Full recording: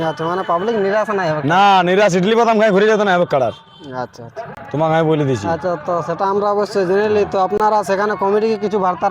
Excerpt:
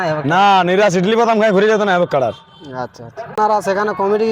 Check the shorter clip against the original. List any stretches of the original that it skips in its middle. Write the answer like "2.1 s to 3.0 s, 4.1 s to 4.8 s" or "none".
4.6 s to 7.6 s